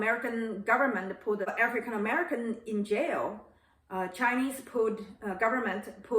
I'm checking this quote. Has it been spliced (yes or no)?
yes